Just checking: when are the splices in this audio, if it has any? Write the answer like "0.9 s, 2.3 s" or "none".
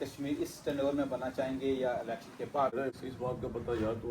2.9 s